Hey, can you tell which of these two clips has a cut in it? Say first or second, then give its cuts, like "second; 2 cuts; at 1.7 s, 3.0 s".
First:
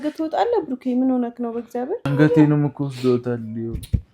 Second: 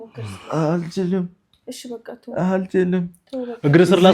first; 1 cut; at 2.1 s